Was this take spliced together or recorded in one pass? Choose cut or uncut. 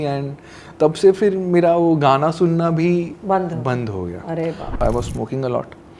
cut